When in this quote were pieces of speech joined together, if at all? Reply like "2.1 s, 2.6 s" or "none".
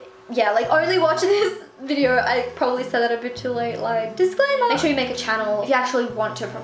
4.8 s